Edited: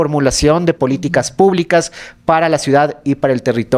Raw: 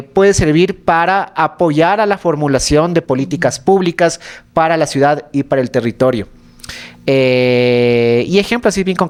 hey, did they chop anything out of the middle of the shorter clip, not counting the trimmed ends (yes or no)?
no